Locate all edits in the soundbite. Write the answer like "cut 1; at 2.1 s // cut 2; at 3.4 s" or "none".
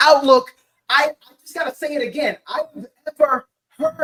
none